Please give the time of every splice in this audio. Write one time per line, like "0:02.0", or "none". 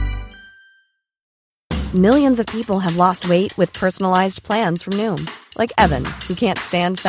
0:01.2

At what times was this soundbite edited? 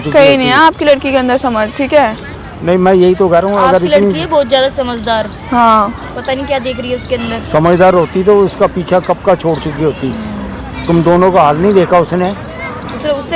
none

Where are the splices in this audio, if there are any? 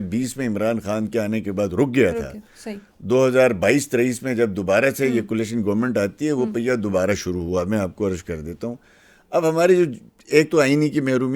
none

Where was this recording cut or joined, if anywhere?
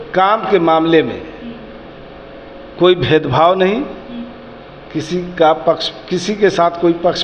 none

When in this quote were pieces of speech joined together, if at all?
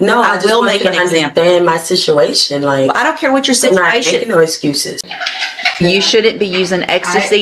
0:05.0

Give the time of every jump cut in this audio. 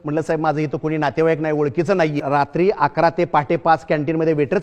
0:02.2

